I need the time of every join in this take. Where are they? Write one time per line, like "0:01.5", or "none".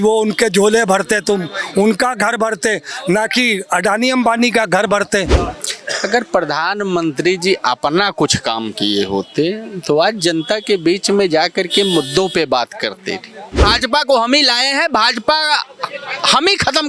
0:05.4
0:13.7